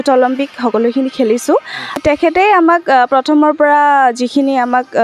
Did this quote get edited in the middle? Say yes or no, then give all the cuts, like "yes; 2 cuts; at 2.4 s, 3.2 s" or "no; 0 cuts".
yes; 1 cut; at 2.0 s